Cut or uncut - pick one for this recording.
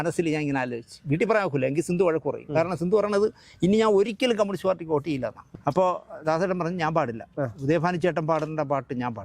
cut